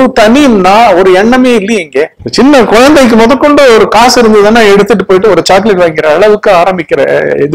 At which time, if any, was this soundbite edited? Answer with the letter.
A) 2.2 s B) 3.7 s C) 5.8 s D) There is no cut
A